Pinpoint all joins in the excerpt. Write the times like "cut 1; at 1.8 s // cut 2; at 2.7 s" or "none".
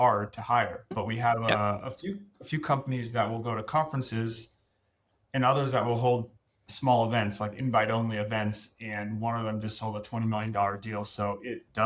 cut 1; at 1.0 s